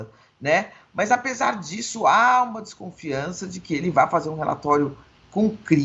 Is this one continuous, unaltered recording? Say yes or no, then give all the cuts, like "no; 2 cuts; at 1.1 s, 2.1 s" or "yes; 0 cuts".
yes; 0 cuts